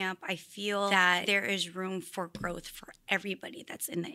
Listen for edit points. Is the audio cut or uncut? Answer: cut